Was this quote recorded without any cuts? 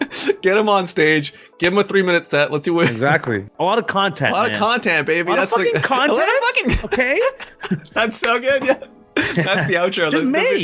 no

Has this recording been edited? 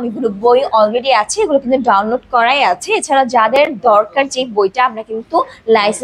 no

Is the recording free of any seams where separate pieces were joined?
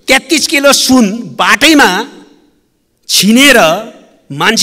yes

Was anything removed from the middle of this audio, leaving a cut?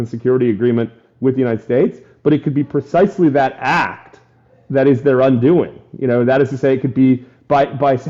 no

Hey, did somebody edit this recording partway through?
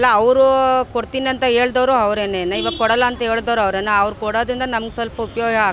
no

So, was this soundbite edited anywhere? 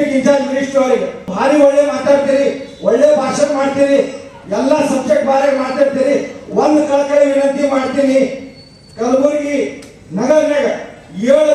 yes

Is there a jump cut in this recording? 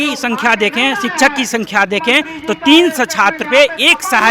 no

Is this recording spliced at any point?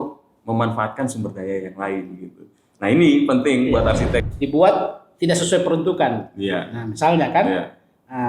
yes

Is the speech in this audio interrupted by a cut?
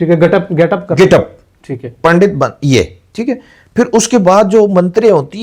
no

